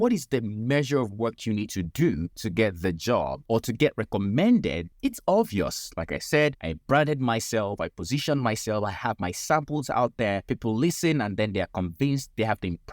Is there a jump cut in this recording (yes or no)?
yes